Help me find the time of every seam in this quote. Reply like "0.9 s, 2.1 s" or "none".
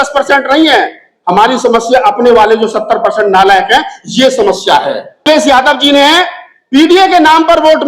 5.2 s